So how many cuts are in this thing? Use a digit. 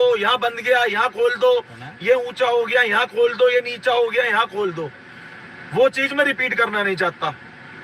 0